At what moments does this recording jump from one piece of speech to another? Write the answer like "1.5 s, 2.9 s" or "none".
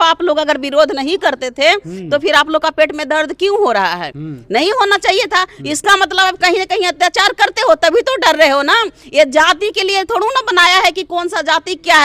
none